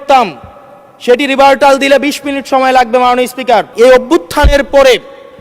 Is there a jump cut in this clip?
yes; 1 cut; at 3.7 s

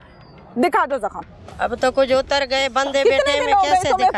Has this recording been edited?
no; 0 cuts

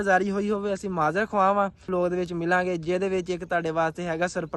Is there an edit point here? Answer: yes; 1 cut; at 1.9 s

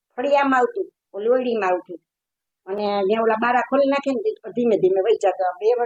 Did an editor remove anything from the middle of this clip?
no; 0 cuts

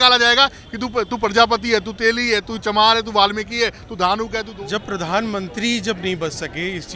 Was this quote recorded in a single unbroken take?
no; 1 cut; at 4.4 s

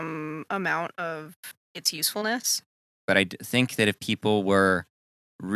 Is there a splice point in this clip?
yes; 1 cut; at 3.0 s

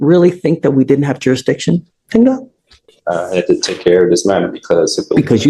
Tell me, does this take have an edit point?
no; 0 cuts

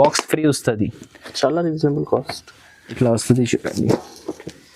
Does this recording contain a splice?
yes; 1 cut; at 3.0 s

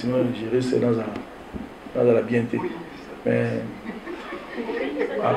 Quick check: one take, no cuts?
yes; 0 cuts

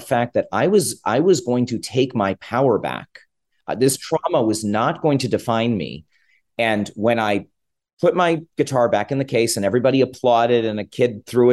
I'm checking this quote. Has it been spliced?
no; 0 cuts

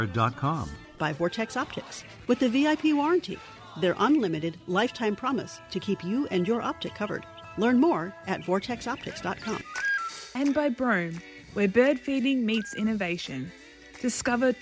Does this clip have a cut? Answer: yes; 1 cut; at 1.0 s

